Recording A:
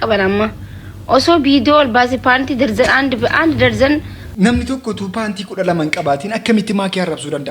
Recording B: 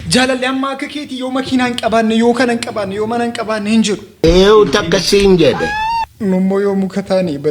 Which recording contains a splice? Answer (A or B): A